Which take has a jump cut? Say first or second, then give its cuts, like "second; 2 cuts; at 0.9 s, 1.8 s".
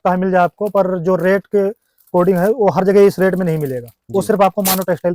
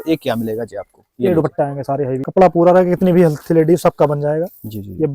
second; 1 cut; at 2.3 s